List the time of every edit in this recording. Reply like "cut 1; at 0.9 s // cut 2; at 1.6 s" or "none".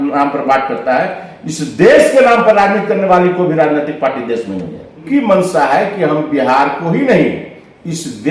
cut 1; at 5.0 s

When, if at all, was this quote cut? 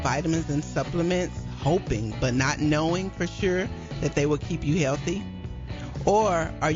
none

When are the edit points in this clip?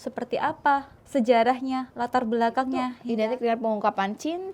cut 1; at 1.0 s // cut 2; at 3.0 s

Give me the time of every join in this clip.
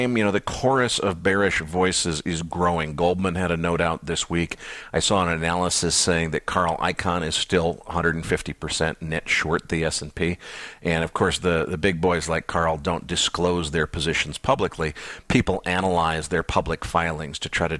cut 1; at 8.6 s

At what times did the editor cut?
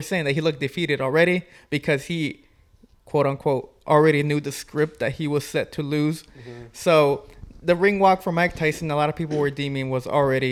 none

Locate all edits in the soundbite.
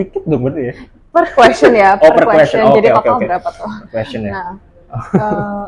none

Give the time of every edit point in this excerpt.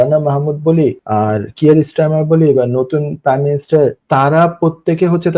cut 1; at 1.0 s // cut 2; at 4.0 s

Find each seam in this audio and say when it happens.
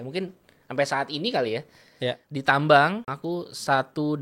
cut 1; at 2.2 s // cut 2; at 3.1 s

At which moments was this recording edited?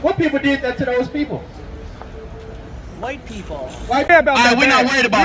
cut 1; at 4.1 s

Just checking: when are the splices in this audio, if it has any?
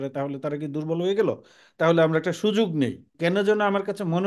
cut 1; at 3.1 s

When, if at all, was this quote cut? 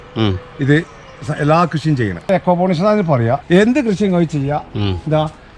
cut 1; at 2.3 s // cut 2; at 3.4 s

